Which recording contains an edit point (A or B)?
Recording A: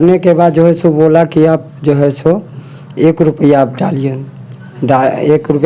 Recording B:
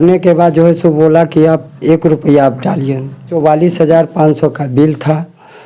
B